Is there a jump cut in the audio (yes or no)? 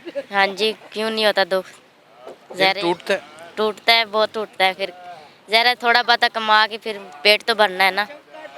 no